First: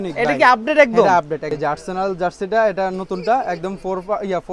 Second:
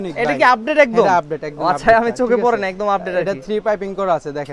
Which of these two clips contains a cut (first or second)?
first